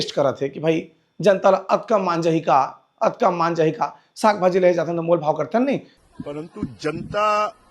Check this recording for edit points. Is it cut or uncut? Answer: cut